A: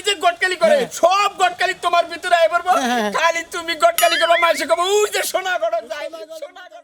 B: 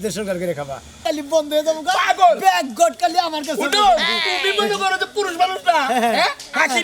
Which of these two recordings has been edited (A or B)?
B